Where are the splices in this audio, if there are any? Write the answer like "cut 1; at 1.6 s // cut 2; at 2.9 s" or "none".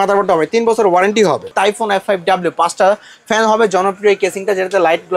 cut 1; at 1.5 s